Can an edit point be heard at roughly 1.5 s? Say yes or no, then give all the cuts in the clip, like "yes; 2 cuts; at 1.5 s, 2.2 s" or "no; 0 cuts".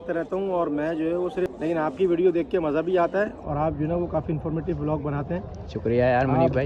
yes; 1 cut; at 1.5 s